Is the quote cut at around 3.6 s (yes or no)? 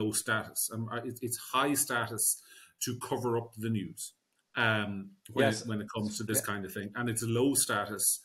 no